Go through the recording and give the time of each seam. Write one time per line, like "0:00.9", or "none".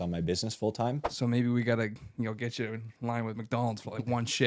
0:01.1